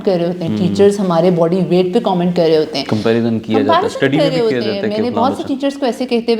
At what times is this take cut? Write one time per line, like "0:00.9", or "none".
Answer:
none